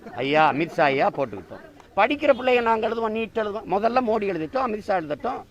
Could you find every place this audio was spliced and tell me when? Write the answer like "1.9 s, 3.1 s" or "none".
1.8 s

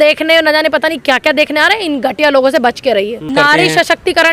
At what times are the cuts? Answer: 3.3 s

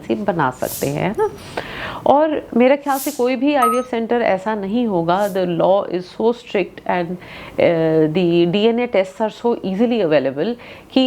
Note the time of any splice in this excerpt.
none

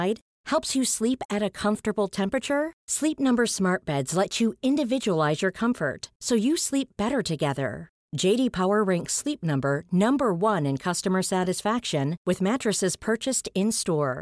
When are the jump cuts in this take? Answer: none

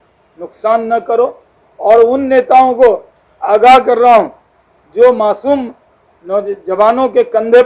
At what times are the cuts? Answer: none

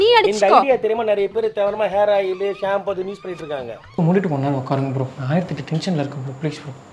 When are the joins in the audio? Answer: none

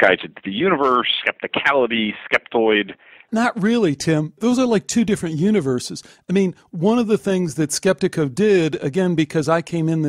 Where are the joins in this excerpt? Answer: 3.2 s, 4.4 s

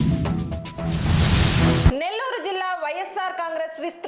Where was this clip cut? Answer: 1.8 s

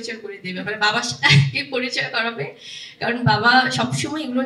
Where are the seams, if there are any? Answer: none

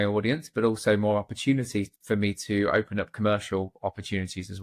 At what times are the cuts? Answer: none

